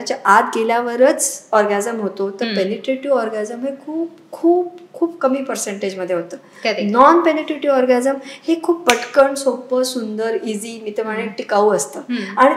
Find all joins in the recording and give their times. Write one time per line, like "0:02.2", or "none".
none